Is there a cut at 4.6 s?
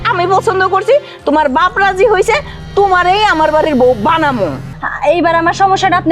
yes; 1 cut; at 4.6 s

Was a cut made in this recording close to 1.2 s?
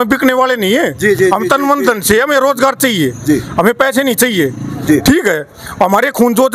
no; 0 cuts

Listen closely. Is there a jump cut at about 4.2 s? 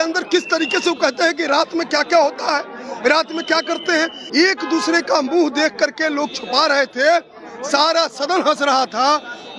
yes; 1 cut; at 4.2 s

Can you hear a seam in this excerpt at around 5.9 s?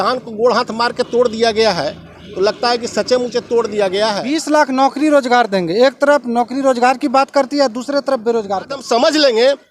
no; 2 cuts; at 4.3 s, 8.8 s

